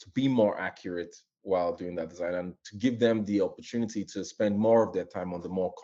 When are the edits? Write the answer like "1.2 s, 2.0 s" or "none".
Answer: none